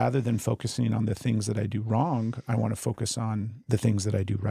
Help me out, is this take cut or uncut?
cut